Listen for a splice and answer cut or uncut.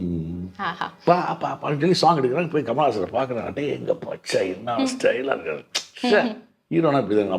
uncut